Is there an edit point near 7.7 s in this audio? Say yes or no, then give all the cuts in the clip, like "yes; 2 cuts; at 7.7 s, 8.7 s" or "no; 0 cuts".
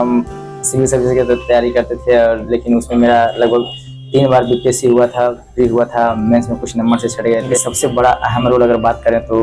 yes; 1 cut; at 7.7 s